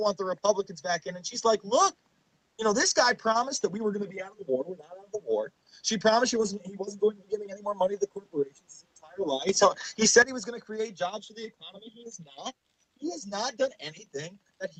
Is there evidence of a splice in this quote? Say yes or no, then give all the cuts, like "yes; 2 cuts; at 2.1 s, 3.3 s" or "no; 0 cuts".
no; 0 cuts